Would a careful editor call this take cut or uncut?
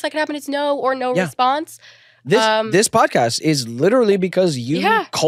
uncut